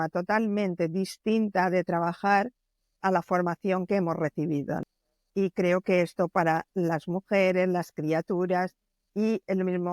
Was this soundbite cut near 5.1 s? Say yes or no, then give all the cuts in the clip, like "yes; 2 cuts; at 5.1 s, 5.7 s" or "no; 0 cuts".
no; 1 cut; at 2.7 s